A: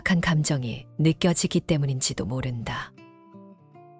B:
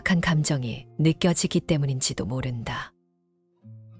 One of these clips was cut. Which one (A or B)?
A